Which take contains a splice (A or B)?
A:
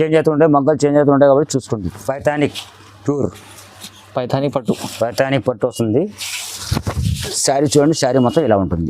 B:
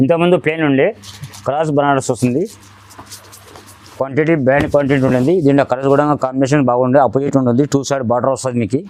A